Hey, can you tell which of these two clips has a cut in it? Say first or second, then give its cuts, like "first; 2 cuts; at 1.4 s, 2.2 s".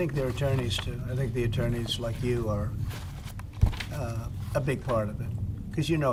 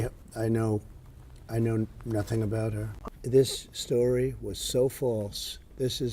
second; 1 cut; at 2.9 s